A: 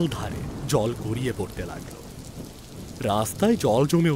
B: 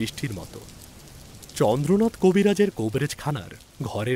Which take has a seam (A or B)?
A